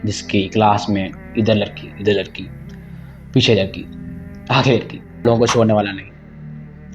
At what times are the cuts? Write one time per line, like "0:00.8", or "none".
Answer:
0:05.2